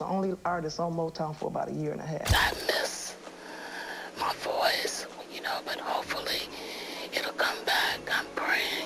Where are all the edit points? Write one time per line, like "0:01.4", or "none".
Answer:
0:02.3